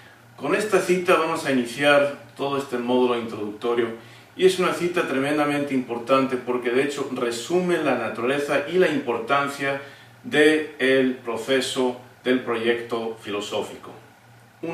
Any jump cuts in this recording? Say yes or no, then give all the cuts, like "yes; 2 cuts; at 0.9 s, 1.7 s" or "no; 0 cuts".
no; 0 cuts